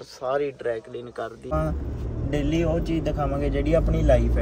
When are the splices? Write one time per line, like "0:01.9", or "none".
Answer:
0:01.5